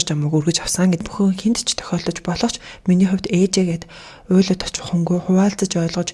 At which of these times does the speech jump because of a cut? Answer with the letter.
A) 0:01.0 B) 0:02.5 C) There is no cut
A